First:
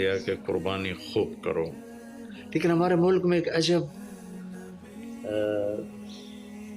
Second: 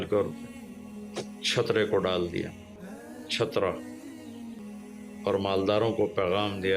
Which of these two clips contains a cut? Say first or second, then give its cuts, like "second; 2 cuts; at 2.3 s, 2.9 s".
second; 1 cut; at 4.6 s